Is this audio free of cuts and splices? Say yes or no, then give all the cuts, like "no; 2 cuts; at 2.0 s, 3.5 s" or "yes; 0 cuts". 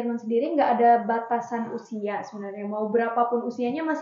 yes; 0 cuts